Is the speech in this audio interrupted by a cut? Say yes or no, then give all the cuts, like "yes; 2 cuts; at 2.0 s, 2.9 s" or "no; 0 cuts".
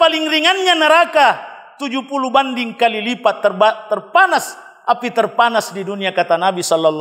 no; 0 cuts